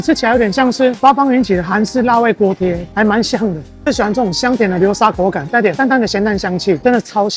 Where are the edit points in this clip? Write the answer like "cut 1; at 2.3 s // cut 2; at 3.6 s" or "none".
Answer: cut 1; at 3.7 s

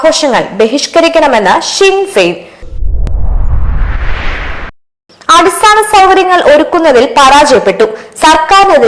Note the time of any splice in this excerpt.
cut 1; at 2.8 s // cut 2; at 4.8 s

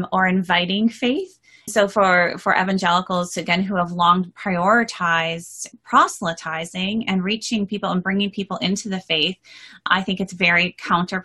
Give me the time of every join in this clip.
cut 1; at 1.7 s // cut 2; at 5.6 s // cut 3; at 9.9 s

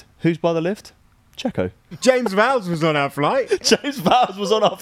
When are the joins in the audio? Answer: cut 1; at 1.8 s

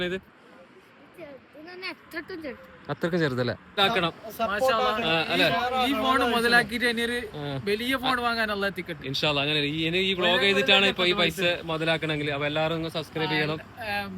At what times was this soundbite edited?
cut 1; at 3.8 s

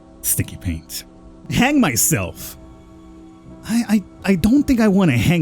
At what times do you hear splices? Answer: cut 1; at 1.4 s

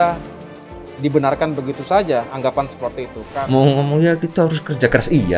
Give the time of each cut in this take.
cut 1; at 3.3 s

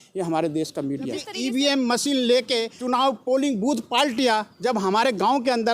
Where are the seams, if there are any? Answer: cut 1; at 1.3 s // cut 2; at 2.7 s

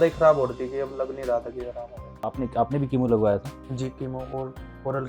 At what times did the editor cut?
cut 1; at 2.0 s

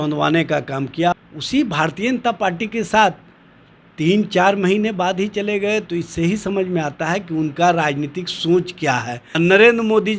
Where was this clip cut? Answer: cut 1; at 1.1 s // cut 2; at 9.2 s

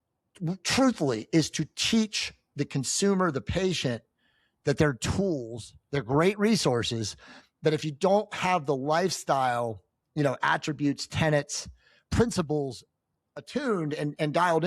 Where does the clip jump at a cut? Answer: none

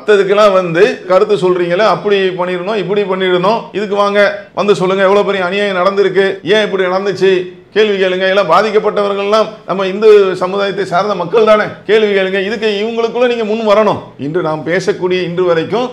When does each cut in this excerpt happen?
none

